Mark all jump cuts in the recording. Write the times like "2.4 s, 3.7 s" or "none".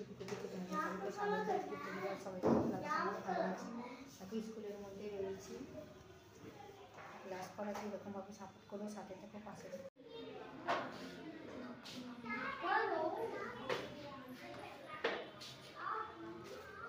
none